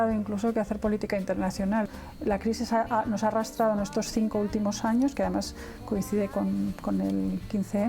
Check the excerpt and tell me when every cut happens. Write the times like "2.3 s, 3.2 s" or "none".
1.9 s